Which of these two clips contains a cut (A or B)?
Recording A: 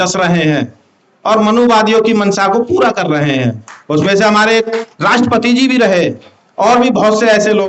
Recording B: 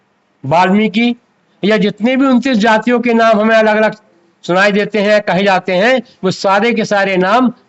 A